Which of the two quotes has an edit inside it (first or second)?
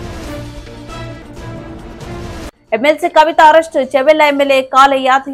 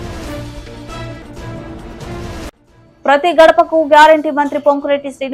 second